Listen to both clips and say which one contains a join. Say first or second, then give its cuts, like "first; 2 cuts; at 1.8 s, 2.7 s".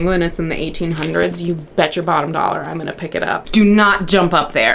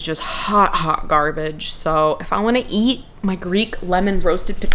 first; 1 cut; at 3.4 s